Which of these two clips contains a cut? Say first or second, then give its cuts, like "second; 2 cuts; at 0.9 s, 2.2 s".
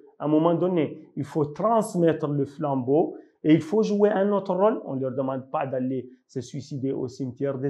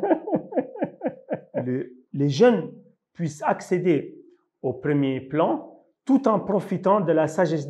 second; 1 cut; at 1.5 s